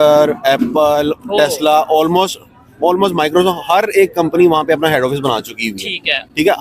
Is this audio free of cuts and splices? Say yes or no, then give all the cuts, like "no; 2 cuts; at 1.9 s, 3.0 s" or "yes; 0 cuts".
yes; 0 cuts